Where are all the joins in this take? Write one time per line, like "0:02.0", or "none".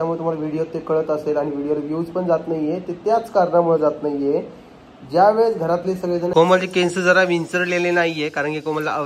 0:06.3